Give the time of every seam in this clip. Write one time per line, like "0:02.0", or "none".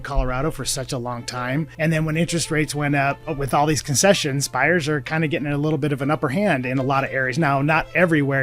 0:01.7
0:03.2
0:05.1